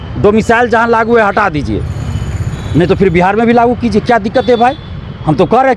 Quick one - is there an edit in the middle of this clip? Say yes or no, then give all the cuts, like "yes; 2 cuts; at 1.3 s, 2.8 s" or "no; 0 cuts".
no; 0 cuts